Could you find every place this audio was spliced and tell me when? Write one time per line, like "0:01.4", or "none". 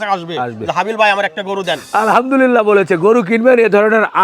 0:01.8